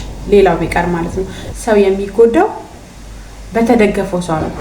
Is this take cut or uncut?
cut